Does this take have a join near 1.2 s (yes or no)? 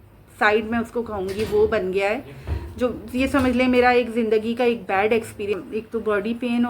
no